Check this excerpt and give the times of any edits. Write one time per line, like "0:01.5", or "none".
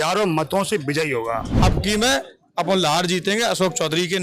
0:01.5